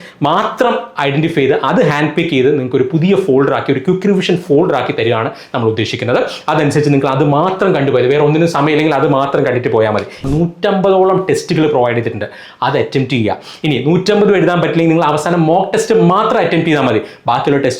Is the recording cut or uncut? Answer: cut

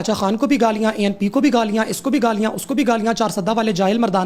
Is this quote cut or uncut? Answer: uncut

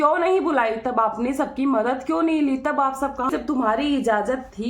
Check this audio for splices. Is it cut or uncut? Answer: cut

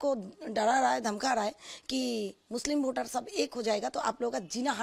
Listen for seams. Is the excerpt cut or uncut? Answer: uncut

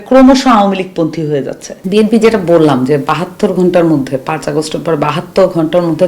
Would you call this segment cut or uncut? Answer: cut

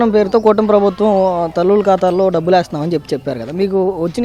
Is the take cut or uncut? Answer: uncut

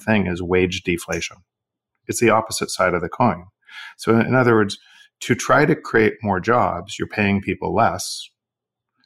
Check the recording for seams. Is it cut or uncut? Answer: uncut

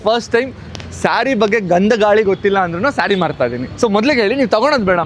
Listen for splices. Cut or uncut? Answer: uncut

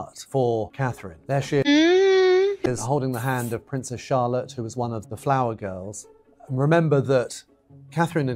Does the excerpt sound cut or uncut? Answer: cut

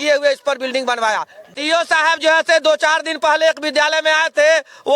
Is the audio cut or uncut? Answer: cut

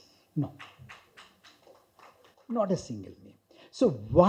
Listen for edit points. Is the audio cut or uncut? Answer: uncut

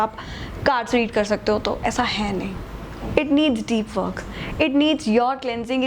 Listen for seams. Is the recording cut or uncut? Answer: uncut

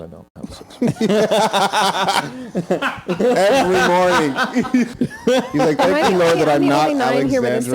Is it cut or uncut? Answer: cut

